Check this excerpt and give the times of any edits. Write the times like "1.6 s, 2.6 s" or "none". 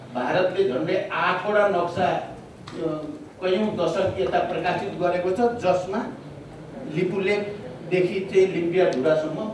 none

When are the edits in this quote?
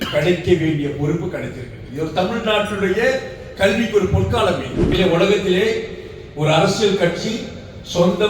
4.9 s

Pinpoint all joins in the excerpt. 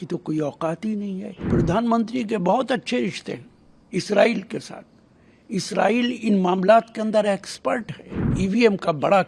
1.5 s, 8.3 s

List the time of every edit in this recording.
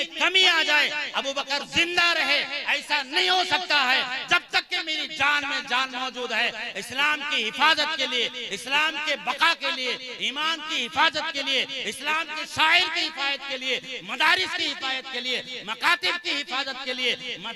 none

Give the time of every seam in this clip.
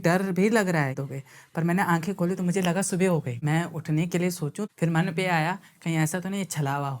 1.0 s, 3.3 s, 4.7 s

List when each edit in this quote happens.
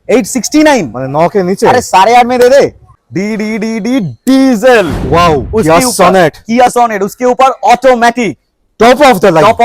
2.9 s

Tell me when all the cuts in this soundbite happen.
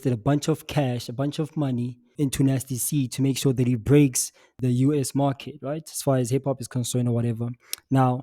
2.1 s, 4.6 s

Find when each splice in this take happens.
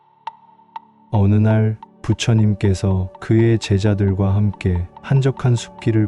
0.9 s

